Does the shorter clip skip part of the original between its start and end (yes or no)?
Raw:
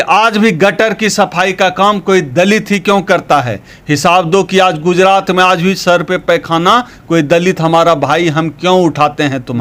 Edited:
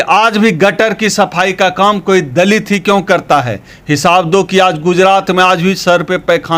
no